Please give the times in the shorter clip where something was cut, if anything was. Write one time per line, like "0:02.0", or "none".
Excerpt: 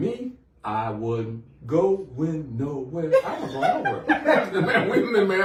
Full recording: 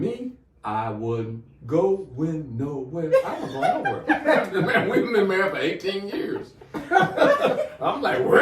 none